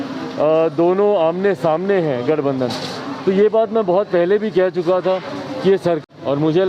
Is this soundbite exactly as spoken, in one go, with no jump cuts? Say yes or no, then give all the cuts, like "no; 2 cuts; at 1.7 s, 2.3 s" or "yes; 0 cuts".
yes; 0 cuts